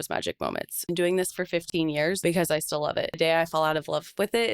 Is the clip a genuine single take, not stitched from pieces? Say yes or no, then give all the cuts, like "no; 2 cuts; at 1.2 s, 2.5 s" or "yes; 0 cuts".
no; 3 cuts; at 0.9 s, 2.2 s, 3.2 s